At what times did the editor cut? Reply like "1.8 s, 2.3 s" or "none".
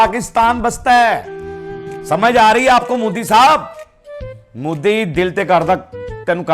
none